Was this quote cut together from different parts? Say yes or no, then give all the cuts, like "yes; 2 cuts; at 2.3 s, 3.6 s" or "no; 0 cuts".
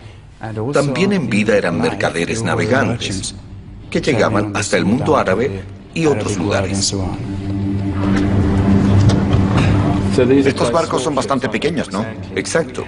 no; 0 cuts